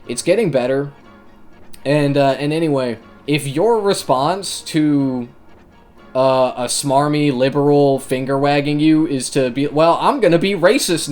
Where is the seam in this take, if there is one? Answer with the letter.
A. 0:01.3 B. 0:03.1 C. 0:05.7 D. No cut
B